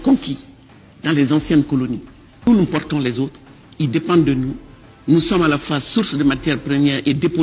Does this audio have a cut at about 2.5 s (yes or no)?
yes